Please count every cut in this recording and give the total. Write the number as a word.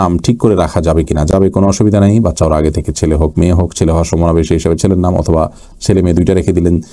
zero